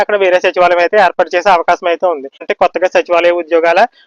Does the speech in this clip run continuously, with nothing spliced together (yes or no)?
no